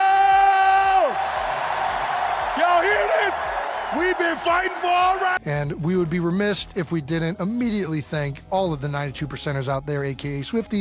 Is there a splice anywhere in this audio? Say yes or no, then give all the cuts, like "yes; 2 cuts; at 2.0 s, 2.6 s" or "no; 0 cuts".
no; 0 cuts